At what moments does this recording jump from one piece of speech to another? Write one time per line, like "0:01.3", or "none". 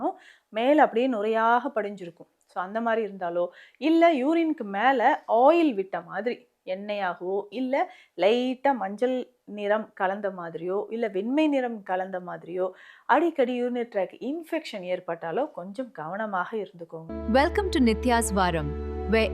0:17.0